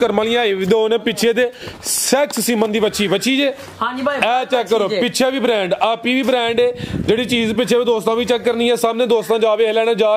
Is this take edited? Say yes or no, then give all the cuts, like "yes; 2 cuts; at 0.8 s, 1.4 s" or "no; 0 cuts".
no; 0 cuts